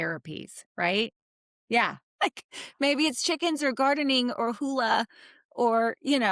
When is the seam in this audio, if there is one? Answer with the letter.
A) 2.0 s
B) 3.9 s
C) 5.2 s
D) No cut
A